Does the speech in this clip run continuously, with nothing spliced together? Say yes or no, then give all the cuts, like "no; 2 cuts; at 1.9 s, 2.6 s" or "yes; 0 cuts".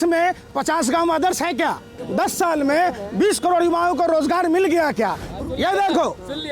no; 2 cuts; at 2.0 s, 5.3 s